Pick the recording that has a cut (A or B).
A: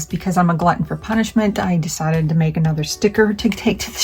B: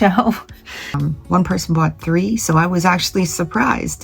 B